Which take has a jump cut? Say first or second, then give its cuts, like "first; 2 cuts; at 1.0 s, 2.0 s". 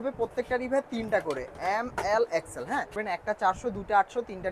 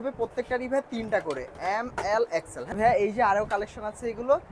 first; 1 cut; at 2.7 s